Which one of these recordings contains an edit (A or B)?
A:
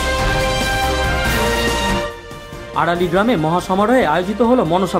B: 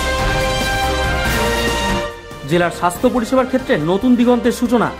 A